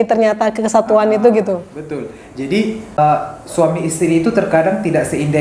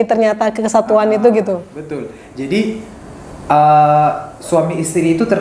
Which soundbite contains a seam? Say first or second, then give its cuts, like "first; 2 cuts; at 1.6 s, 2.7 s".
first; 1 cut; at 3.0 s